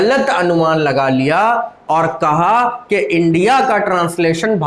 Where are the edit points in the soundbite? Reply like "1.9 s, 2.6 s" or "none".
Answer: none